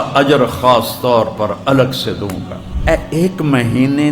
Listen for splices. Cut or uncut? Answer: cut